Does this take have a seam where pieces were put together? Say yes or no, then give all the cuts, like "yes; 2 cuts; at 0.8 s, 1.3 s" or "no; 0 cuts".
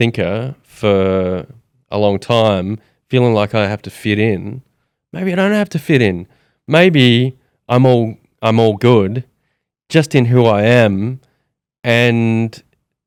no; 0 cuts